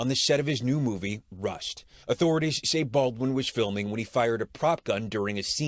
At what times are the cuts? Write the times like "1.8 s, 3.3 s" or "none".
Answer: 2.0 s